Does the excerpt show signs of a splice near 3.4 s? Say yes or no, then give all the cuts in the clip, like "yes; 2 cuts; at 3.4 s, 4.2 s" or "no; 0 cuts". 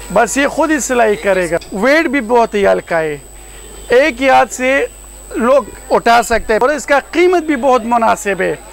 no; 2 cuts; at 1.6 s, 6.6 s